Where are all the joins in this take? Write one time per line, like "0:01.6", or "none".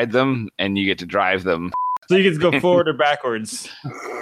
0:01.9